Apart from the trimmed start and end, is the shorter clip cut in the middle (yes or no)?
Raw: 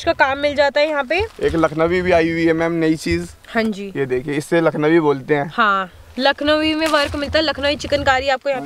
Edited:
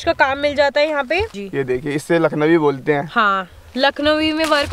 yes